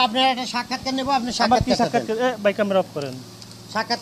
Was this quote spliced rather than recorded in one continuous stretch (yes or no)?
no